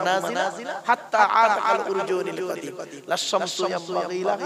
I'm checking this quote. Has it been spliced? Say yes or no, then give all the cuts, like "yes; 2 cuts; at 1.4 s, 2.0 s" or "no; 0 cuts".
no; 0 cuts